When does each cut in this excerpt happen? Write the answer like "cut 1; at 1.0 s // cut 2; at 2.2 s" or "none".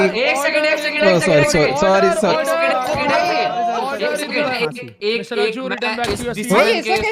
cut 1; at 4.5 s